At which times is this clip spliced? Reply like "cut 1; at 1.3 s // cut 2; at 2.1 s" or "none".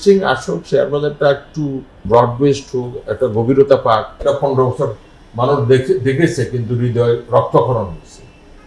cut 1; at 2.0 s // cut 2; at 4.2 s